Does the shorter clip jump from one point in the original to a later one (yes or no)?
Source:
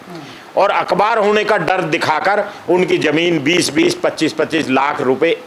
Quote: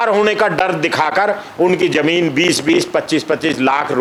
no